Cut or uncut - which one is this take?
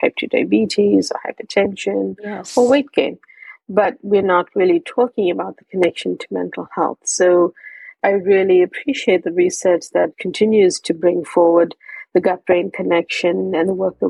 cut